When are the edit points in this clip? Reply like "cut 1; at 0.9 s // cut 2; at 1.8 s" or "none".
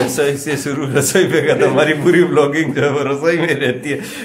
none